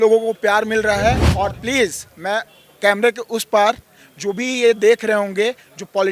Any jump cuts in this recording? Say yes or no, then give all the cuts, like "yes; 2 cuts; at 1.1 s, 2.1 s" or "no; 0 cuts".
yes; 1 cut; at 1.3 s